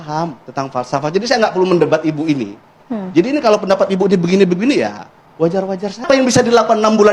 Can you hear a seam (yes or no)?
yes